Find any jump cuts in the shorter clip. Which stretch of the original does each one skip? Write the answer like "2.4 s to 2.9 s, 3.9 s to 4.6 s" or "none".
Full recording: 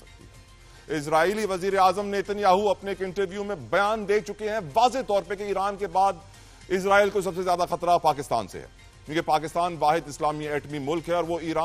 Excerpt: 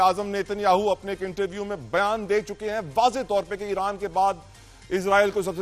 none